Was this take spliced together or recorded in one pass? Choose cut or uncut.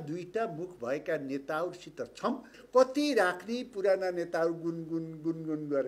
cut